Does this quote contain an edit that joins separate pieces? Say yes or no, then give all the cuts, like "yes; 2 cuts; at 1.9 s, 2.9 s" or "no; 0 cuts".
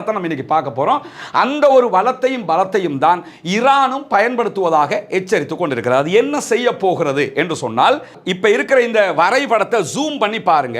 no; 0 cuts